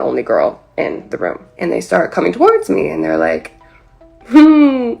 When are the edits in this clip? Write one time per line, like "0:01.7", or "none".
0:01.5